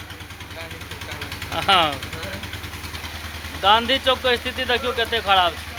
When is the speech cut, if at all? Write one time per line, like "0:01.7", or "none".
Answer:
none